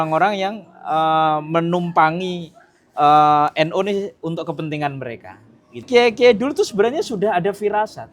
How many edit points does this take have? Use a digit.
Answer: 1